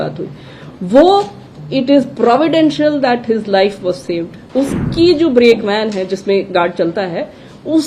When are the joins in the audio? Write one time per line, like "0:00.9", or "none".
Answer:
0:04.4